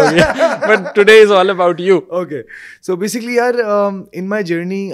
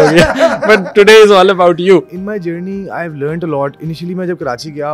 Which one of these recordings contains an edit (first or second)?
second